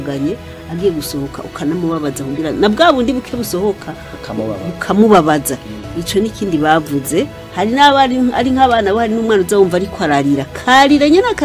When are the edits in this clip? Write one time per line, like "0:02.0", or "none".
0:07.4